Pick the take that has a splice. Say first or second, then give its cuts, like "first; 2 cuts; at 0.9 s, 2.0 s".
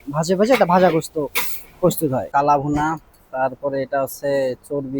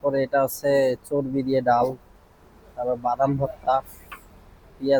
first; 1 cut; at 2.3 s